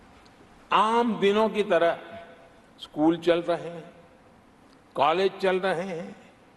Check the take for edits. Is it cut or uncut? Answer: uncut